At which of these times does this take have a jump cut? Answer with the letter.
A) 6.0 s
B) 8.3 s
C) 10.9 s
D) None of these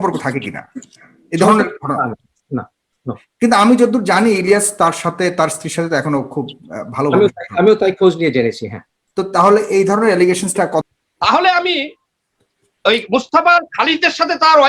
C